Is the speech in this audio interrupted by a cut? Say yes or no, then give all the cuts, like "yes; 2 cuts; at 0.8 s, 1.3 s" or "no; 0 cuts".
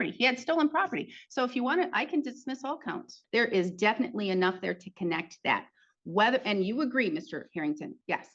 yes; 1 cut; at 3.1 s